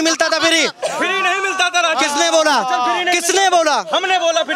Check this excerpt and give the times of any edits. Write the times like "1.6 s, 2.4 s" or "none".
none